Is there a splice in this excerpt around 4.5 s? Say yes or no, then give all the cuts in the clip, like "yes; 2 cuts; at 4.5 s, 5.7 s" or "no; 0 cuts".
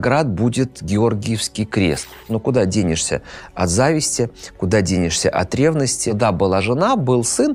no; 2 cuts; at 2.2 s, 6.0 s